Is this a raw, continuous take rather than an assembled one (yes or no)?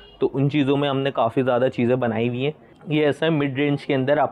yes